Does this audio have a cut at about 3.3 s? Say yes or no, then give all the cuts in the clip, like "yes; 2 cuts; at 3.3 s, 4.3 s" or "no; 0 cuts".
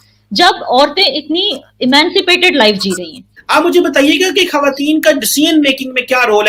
no; 0 cuts